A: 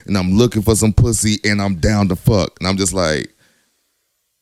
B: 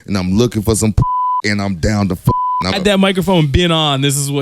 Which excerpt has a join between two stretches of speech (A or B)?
B